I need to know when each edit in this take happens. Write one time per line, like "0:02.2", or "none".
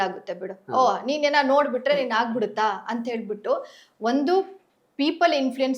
none